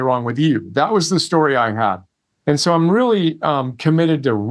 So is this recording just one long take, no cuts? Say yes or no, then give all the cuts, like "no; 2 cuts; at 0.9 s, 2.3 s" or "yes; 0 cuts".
yes; 0 cuts